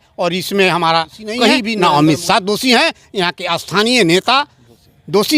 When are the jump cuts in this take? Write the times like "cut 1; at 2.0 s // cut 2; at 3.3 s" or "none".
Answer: cut 1; at 1.7 s